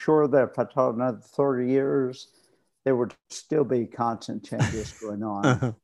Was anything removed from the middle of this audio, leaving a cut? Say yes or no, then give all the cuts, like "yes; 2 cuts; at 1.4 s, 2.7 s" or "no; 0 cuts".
no; 0 cuts